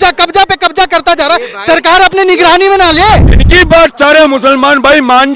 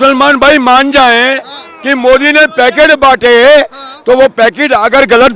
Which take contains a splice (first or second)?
first